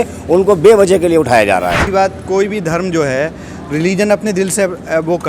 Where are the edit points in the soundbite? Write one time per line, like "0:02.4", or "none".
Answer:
0:01.9